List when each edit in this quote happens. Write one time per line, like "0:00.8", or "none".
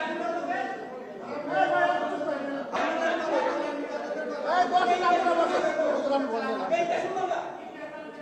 0:02.8